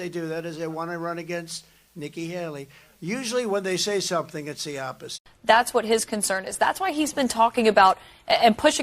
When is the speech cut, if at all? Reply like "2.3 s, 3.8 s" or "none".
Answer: 5.1 s